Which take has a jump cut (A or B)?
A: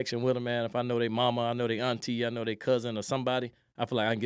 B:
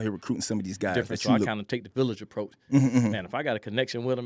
B